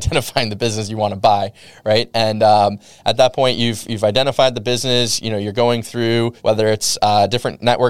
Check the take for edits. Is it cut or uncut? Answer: uncut